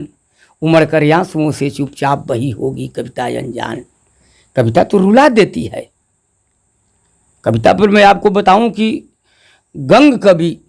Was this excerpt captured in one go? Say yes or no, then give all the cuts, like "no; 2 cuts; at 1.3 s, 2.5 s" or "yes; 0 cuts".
yes; 0 cuts